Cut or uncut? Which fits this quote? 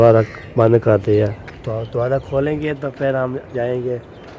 uncut